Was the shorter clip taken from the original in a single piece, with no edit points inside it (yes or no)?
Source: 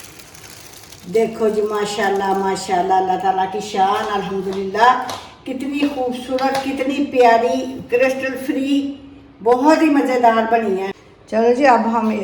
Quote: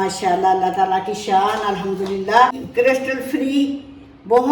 no